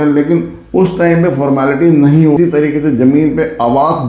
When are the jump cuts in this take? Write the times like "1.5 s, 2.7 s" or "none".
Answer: 2.4 s